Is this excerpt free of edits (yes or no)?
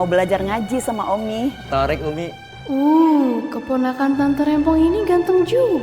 no